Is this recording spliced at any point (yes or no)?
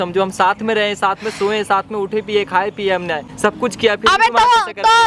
yes